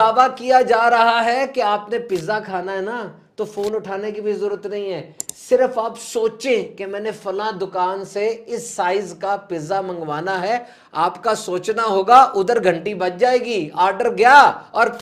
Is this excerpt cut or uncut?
uncut